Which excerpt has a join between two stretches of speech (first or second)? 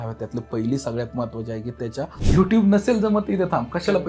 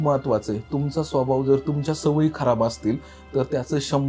first